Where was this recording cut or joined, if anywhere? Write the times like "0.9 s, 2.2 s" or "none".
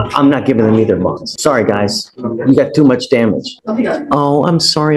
1.3 s, 3.5 s